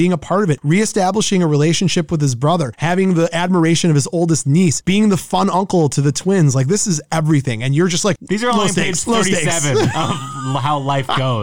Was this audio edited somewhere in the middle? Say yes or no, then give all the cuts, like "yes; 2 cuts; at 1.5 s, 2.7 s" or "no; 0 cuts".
no; 0 cuts